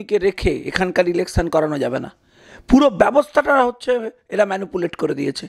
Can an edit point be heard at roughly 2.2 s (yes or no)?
no